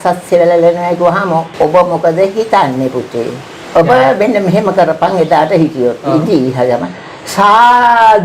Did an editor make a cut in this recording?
yes; 2 cuts; at 1.5 s, 3.5 s

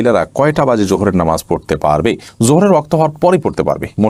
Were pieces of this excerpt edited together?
no; 0 cuts

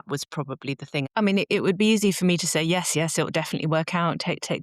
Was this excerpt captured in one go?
no; 1 cut; at 1.1 s

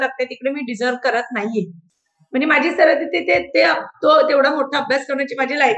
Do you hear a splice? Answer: no; 0 cuts

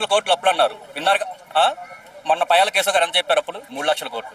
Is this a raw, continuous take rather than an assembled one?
yes; 0 cuts

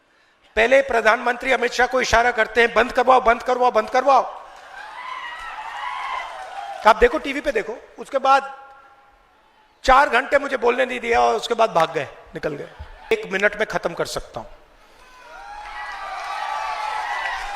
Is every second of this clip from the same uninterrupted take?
no; 1 cut; at 13.1 s

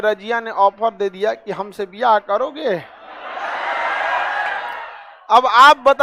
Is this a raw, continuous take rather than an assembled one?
yes; 0 cuts

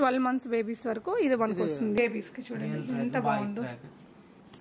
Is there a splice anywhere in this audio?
yes; 1 cut; at 2.0 s

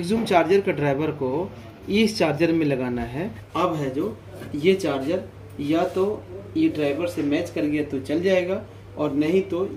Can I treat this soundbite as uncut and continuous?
no; 1 cut; at 3.4 s

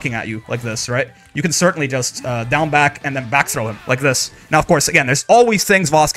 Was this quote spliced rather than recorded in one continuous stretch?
no; 0 cuts

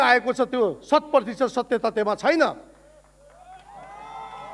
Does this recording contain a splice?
no; 0 cuts

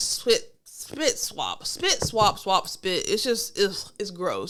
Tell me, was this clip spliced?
no; 0 cuts

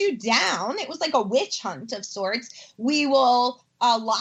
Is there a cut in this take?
no; 0 cuts

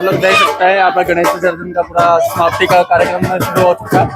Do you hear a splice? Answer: no; 0 cuts

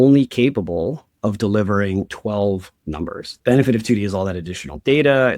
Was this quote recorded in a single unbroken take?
no; 2 cuts; at 2.1 s, 3.3 s

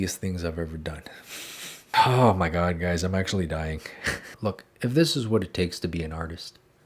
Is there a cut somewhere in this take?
yes; 2 cuts; at 1.9 s, 4.3 s

